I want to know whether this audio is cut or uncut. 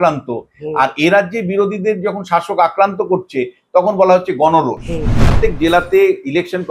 cut